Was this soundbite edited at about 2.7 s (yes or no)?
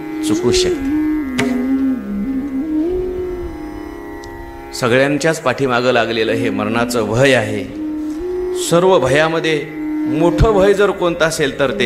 no